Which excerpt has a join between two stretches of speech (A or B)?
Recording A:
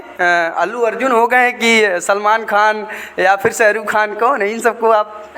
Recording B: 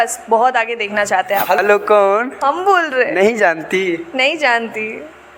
B